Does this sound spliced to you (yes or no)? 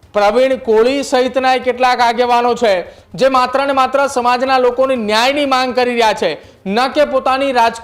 yes